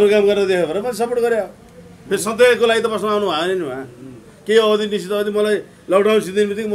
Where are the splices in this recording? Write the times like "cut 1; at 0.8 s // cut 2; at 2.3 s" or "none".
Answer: none